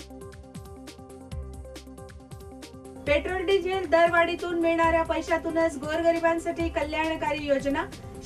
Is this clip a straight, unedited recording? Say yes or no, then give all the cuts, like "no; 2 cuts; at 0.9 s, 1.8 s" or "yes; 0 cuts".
no; 1 cut; at 0.9 s